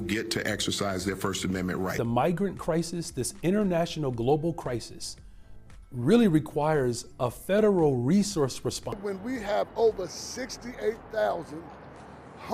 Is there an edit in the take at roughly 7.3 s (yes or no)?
no